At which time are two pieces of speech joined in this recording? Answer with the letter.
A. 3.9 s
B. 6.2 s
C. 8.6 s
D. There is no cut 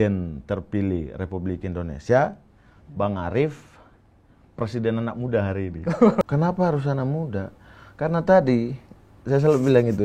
B